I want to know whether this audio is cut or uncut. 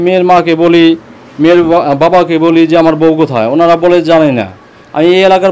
uncut